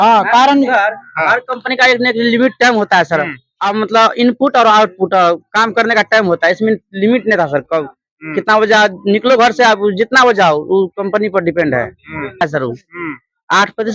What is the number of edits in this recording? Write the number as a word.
one